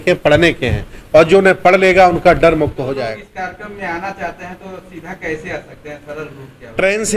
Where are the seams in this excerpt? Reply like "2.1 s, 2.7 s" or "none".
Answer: 3.1 s